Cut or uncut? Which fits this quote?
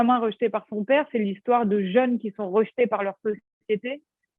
uncut